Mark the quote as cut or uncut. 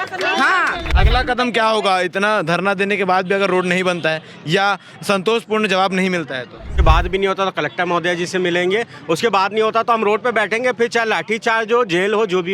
cut